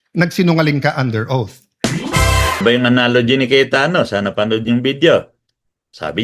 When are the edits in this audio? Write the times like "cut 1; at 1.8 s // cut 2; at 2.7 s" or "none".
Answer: cut 1; at 2.6 s